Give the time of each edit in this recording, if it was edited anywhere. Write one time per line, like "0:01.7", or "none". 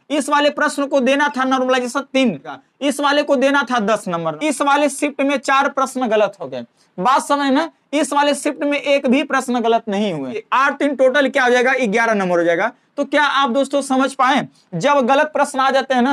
0:02.6
0:04.3
0:10.5